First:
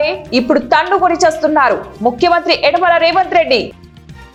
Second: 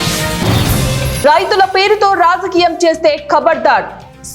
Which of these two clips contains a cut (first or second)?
second